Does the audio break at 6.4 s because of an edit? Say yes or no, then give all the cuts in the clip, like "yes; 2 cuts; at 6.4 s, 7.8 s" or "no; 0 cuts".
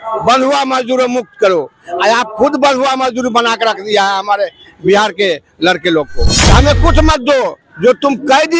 yes; 1 cut; at 6.4 s